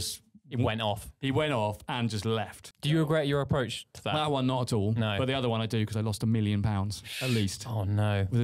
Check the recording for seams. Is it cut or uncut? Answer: cut